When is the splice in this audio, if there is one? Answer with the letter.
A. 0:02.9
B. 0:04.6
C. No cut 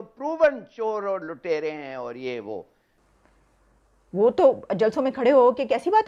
A